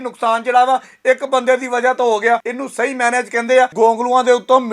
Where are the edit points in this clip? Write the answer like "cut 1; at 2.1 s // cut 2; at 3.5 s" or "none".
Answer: cut 1; at 2.5 s // cut 2; at 3.7 s

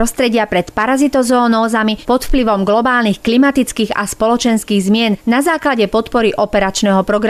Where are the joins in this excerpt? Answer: cut 1; at 5.2 s

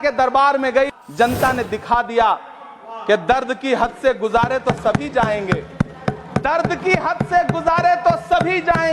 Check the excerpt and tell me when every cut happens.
cut 1; at 0.9 s

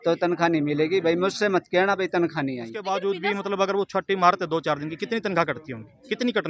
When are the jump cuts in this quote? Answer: cut 1; at 2.7 s

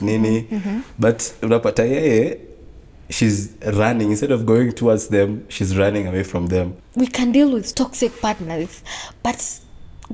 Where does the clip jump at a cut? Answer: cut 1; at 6.8 s // cut 2; at 7.7 s

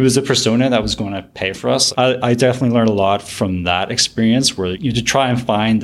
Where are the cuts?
cut 1; at 4.8 s

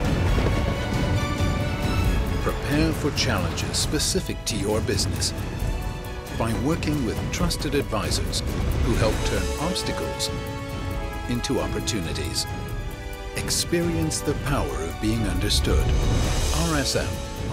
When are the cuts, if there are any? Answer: none

